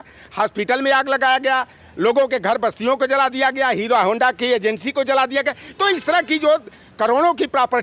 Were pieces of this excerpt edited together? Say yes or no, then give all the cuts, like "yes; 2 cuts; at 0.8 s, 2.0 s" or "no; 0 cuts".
no; 0 cuts